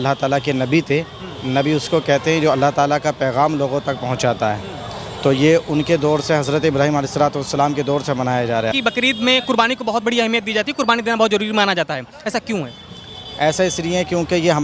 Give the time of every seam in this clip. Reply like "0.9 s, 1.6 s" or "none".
8.7 s